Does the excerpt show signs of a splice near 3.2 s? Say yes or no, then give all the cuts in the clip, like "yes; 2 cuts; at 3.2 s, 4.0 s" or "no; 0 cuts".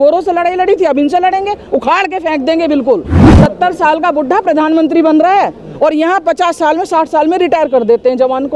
yes; 1 cut; at 3.2 s